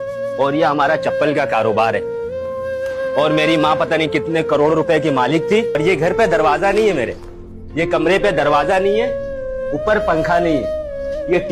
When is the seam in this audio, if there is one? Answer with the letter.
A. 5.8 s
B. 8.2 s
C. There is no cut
A